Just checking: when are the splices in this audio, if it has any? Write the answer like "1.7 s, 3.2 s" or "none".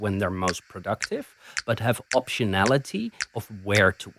3.2 s